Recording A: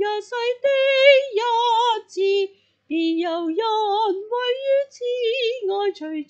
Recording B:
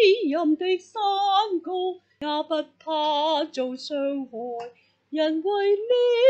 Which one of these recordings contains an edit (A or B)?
B